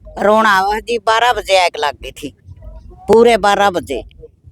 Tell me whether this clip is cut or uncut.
uncut